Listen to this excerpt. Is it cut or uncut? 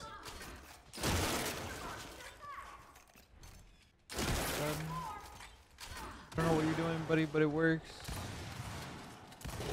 cut